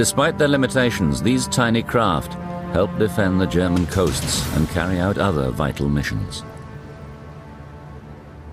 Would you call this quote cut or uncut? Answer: cut